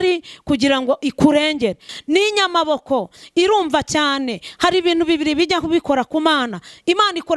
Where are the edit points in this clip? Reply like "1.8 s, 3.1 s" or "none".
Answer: 1.9 s